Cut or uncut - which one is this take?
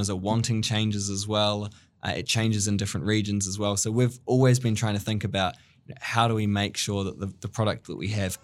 uncut